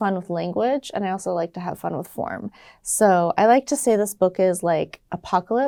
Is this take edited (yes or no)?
no